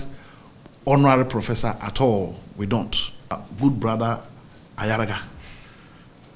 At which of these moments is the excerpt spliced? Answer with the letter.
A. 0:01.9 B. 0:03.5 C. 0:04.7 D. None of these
B